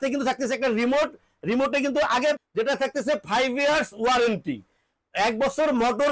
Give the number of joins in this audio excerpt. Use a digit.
1